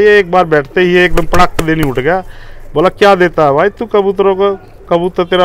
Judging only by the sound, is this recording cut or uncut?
uncut